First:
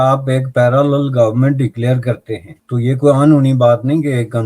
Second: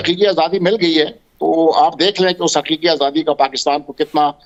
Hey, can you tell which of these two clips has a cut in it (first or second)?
first